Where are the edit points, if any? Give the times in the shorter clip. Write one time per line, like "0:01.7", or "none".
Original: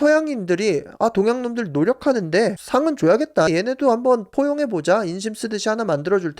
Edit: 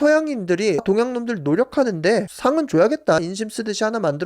0:00.8
0:03.2